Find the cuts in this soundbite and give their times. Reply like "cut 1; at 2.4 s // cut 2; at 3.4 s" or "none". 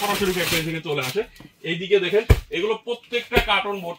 none